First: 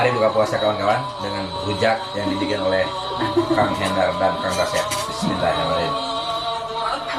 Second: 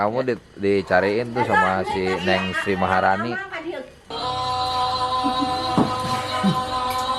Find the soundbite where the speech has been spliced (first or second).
second